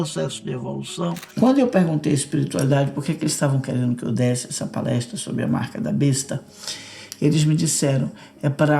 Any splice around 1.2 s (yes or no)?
yes